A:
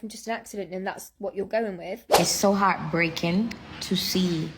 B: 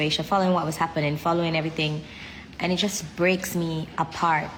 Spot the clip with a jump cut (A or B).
A